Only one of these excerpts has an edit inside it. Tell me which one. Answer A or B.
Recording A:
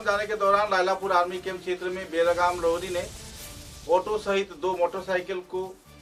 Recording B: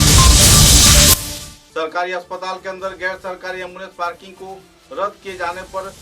B